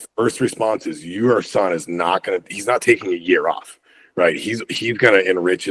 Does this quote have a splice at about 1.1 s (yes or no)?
no